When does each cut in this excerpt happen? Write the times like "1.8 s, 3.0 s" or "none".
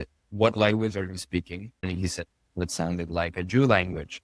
1.7 s